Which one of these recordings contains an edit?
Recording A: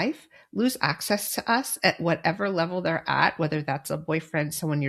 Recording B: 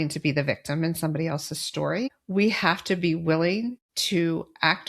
B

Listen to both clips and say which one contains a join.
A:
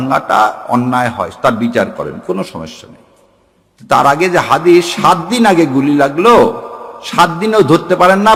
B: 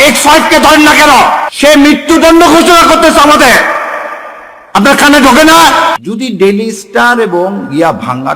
B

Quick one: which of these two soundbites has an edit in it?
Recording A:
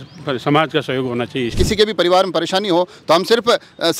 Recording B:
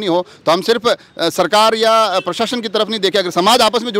A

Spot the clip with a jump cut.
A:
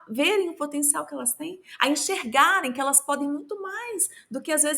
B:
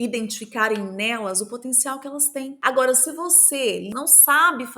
B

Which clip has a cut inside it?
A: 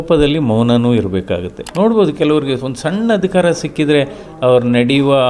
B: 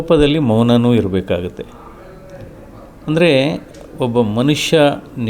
A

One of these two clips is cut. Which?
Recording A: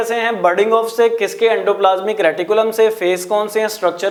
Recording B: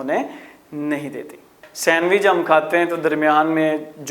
B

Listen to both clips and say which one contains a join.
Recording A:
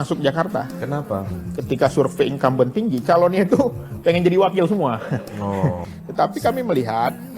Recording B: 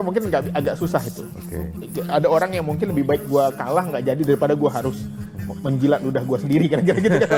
A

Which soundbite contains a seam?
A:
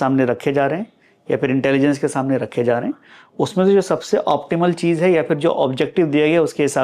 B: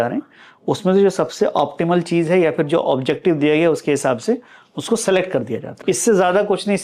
B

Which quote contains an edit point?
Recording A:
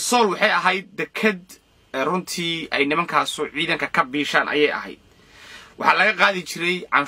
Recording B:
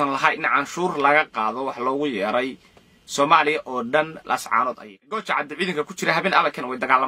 B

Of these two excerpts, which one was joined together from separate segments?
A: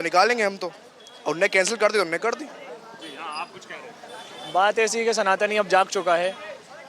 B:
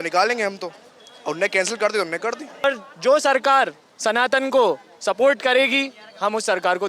B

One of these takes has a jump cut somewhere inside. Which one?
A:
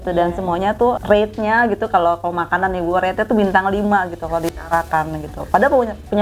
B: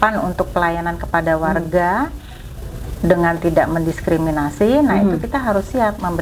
A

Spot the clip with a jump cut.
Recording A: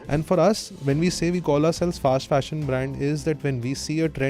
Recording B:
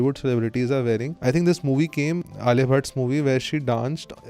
B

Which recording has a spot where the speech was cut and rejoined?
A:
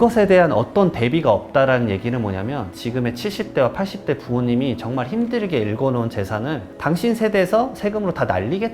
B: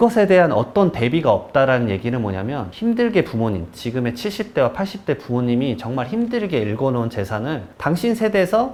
A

